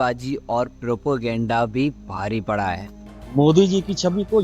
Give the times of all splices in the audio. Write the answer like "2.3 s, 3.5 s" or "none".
3.1 s

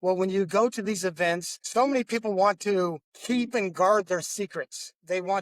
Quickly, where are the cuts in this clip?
1.5 s, 3.1 s

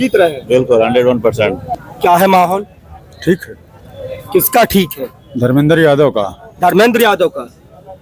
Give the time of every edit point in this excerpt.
1.6 s

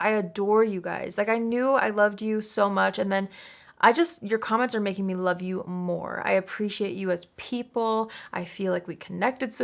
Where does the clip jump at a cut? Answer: none

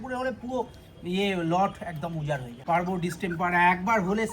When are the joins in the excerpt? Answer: 2.5 s

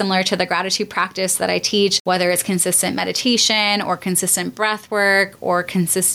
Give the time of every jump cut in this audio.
2.0 s

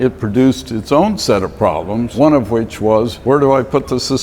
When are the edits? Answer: 2.1 s, 3.2 s

